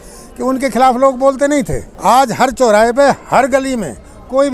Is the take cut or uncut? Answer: cut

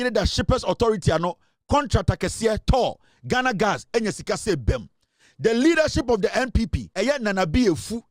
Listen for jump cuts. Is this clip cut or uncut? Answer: cut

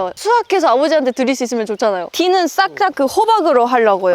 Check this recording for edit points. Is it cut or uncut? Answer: cut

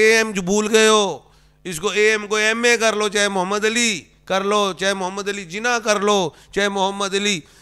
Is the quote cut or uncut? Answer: uncut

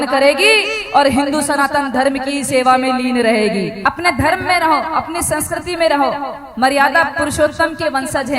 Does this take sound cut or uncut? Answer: cut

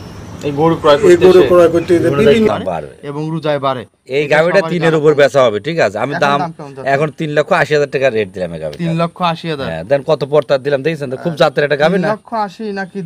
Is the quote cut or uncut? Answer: cut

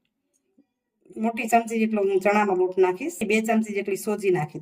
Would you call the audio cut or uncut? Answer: cut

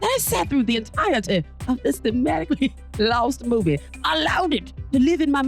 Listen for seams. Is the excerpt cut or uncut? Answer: uncut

